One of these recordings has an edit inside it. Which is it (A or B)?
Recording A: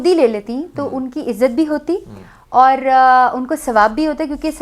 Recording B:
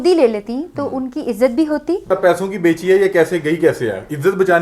B